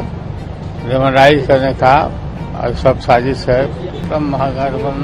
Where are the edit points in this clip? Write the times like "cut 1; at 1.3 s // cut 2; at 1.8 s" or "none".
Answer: cut 1; at 3.9 s